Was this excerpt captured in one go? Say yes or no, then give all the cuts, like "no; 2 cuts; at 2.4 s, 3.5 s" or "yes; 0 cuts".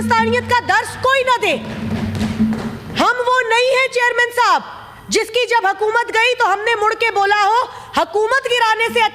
yes; 0 cuts